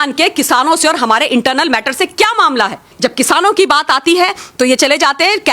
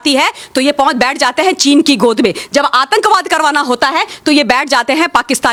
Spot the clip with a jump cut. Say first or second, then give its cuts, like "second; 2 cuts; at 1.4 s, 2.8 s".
first; 1 cut; at 2.9 s